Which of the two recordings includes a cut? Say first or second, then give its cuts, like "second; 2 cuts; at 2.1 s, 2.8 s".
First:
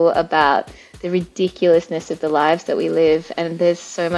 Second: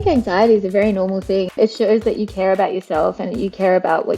second; 1 cut; at 1.6 s